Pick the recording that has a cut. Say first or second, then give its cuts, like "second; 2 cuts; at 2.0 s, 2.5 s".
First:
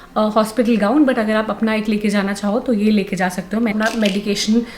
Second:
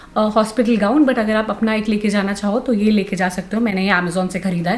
first; 1 cut; at 3.7 s